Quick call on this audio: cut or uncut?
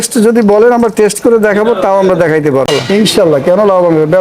cut